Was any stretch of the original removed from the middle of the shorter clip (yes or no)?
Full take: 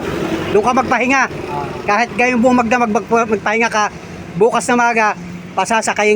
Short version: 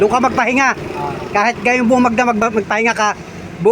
yes